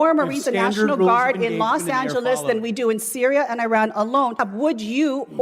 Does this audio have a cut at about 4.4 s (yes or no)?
yes